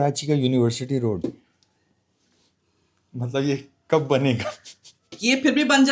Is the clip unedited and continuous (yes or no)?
yes